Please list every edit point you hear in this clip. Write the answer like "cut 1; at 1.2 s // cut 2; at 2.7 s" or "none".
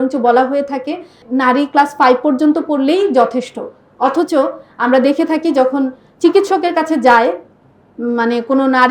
cut 1; at 1.2 s

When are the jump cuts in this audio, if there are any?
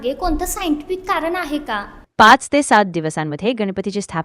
none

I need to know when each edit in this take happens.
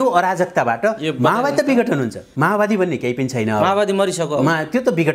cut 1; at 2.2 s

